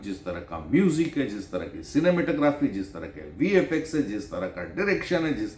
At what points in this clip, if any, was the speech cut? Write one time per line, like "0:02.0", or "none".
none